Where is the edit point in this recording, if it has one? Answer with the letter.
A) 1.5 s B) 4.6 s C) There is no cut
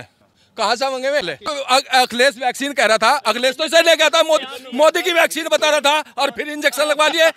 A